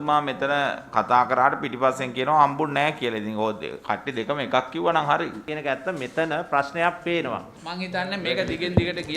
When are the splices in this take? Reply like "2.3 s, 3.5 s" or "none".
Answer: 5.5 s, 7.6 s